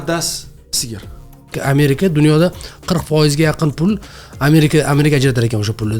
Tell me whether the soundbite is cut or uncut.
cut